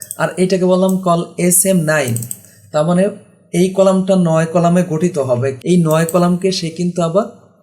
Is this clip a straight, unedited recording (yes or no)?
no